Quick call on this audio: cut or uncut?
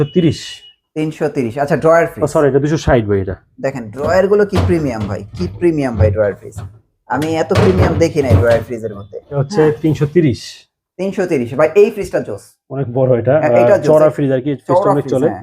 cut